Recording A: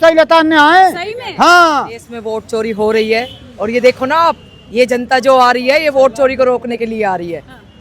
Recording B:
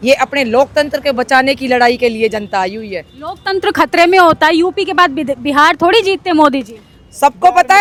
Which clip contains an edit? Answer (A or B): A